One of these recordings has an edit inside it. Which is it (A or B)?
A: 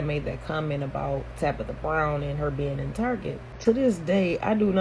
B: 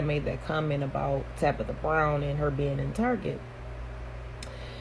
A